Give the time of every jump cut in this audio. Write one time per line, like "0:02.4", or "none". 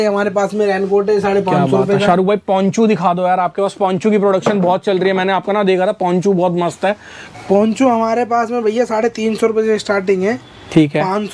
none